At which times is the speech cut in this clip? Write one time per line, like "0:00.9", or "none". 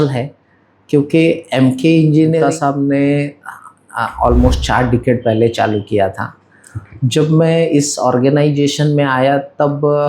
0:02.4